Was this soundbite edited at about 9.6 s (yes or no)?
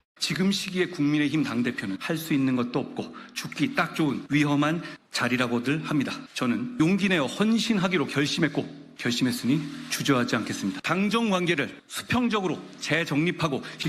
yes